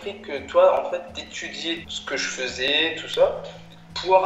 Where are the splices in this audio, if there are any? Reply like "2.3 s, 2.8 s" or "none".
1.8 s